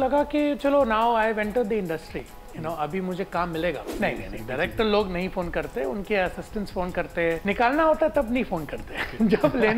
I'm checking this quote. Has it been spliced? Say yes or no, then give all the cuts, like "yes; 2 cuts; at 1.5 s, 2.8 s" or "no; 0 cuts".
yes; 2 cuts; at 3.9 s, 7.4 s